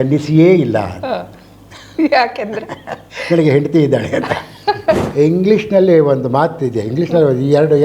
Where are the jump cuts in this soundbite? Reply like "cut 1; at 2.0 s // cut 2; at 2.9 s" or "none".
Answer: cut 1; at 5.1 s